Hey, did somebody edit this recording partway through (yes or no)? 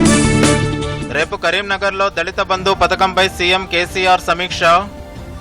yes